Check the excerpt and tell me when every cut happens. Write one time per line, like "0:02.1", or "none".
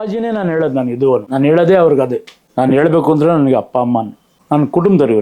0:01.3
0:02.4
0:04.3